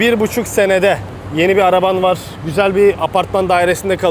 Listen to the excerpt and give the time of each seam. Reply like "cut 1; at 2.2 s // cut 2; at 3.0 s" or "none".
cut 1; at 1.2 s // cut 2; at 2.3 s